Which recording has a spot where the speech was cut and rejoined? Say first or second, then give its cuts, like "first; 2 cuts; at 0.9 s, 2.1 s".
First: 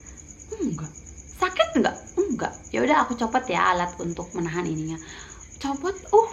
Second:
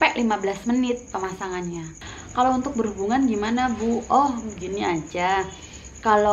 second; 1 cut; at 2.0 s